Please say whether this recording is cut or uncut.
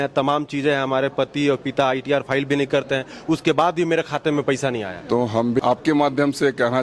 cut